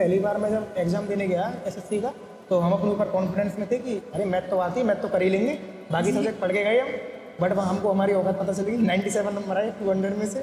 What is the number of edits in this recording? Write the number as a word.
zero